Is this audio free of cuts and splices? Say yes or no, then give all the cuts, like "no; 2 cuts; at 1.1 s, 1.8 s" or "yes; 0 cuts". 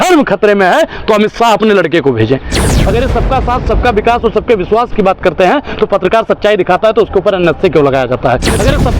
no; 1 cut; at 2.7 s